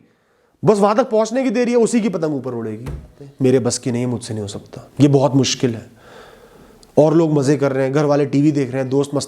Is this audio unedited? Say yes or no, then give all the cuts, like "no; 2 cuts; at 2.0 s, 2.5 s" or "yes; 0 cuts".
no; 1 cut; at 3.2 s